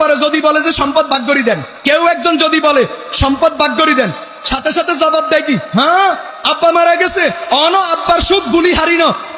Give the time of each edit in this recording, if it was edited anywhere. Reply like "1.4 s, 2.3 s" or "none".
1.7 s